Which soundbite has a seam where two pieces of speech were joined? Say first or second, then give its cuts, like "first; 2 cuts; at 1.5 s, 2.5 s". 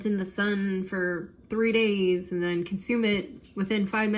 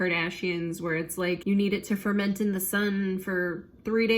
second; 1 cut; at 1.4 s